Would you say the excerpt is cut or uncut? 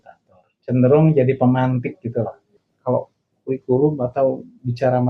cut